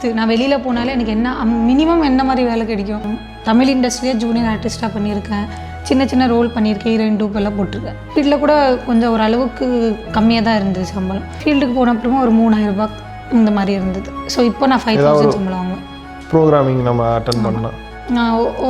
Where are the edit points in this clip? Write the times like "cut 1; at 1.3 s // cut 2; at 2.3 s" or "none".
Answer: cut 1; at 3.1 s // cut 2; at 8.1 s // cut 3; at 11.4 s